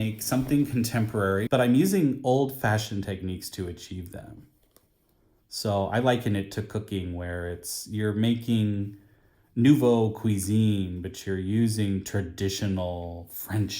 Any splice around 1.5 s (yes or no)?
yes